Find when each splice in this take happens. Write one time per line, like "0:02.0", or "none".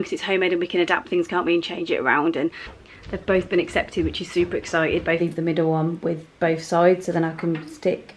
0:02.7
0:05.2